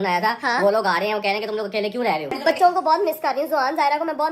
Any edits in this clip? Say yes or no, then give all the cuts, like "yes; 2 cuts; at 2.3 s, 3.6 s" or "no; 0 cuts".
yes; 1 cut; at 2.4 s